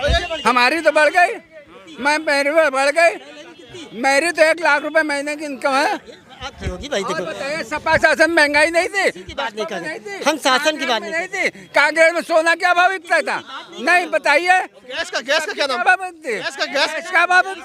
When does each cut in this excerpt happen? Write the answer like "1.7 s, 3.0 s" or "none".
none

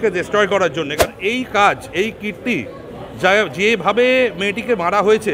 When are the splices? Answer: 1.1 s

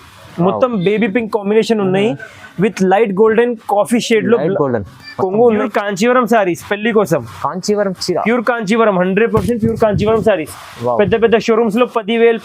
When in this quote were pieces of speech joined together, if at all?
5.6 s

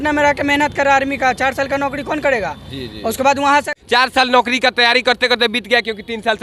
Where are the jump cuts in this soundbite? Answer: none

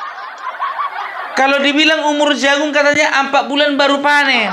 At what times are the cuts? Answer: 1.1 s

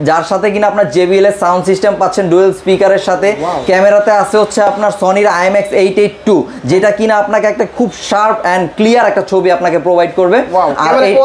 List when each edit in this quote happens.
none

